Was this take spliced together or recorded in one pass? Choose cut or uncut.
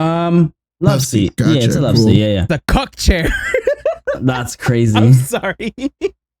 cut